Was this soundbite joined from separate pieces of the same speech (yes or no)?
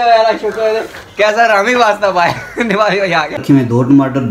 yes